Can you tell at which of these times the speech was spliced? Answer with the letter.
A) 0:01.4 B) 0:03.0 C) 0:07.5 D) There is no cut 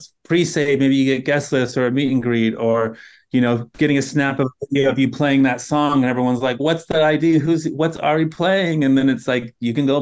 D